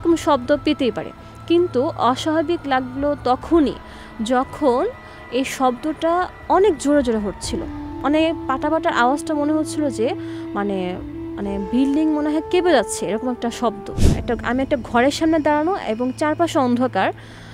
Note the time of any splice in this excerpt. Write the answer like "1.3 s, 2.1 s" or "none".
13.9 s